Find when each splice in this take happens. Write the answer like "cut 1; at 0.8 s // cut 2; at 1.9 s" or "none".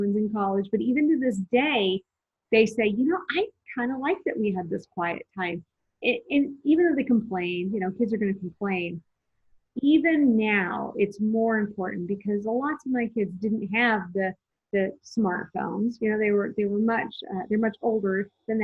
none

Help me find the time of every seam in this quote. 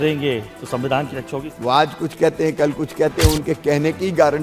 cut 1; at 1.5 s

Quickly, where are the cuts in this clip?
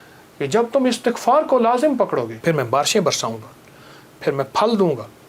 cut 1; at 2.3 s

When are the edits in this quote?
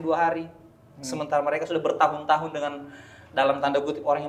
none

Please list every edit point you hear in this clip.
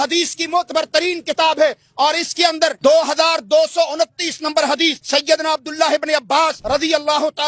cut 1; at 2.8 s // cut 2; at 5.0 s // cut 3; at 6.6 s

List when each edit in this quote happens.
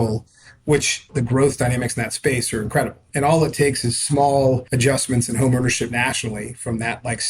cut 1; at 1.1 s // cut 2; at 3.0 s // cut 3; at 4.7 s

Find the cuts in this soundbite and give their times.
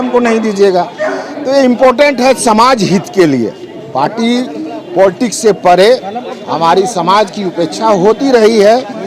none

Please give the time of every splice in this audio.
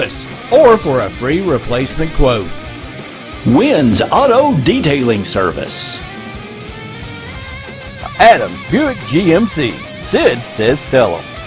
none

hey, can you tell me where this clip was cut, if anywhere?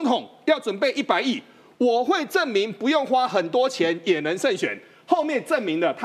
none

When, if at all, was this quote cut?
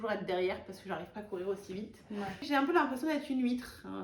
cut 1; at 2.4 s

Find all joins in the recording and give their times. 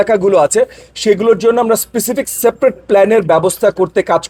none

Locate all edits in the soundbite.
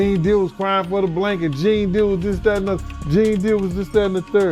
none

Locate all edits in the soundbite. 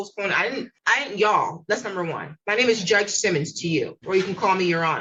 none

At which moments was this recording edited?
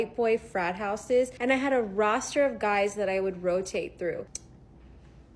cut 1; at 1.3 s // cut 2; at 4.4 s

